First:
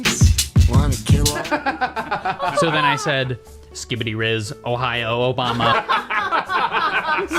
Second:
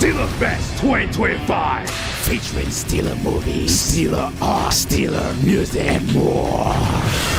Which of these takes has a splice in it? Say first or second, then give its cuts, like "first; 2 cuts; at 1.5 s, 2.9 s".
first; 1 cut; at 1.4 s